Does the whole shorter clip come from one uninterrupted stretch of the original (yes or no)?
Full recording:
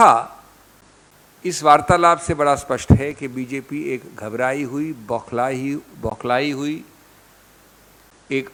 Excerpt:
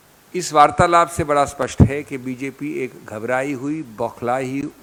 yes